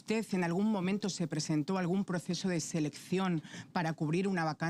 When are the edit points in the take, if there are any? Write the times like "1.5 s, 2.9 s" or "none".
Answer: none